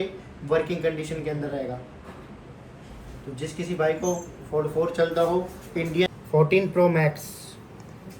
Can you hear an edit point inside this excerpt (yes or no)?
yes